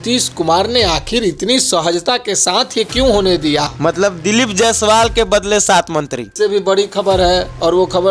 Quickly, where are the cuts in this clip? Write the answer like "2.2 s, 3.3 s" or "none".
3.7 s, 6.3 s